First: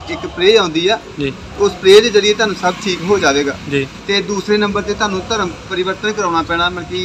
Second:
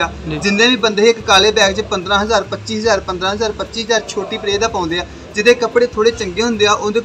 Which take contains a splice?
first; 1 cut; at 4.0 s

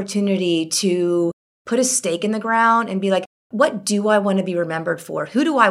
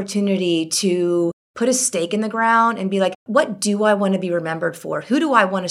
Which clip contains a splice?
second; 2 cuts; at 1.4 s, 3.2 s

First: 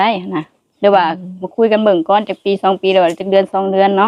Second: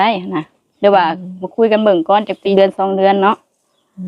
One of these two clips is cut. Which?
second; 1 cut; at 2.5 s

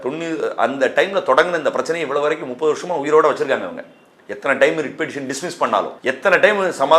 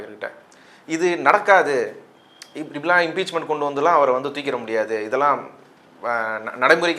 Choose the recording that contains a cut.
first; 1 cut; at 5.9 s

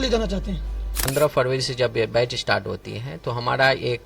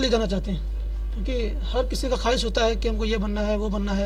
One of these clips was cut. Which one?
first; 1 cut; at 1.1 s

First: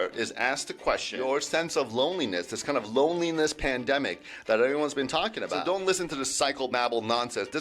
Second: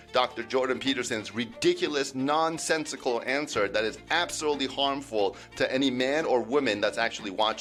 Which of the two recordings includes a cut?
first; 2 cuts; at 1.1 s, 5.6 s

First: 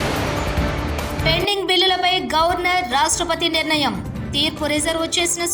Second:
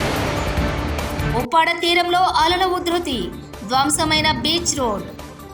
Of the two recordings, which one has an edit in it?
first; 1 cut; at 1.2 s

